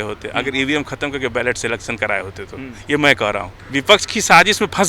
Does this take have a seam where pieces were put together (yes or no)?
yes